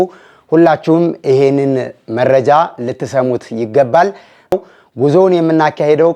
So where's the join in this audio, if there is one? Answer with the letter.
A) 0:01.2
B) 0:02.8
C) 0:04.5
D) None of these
C